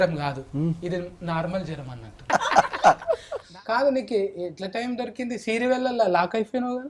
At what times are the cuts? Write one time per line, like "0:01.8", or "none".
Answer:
0:02.2
0:03.5